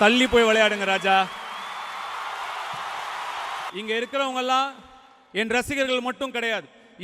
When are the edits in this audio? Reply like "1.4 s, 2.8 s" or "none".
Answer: 3.7 s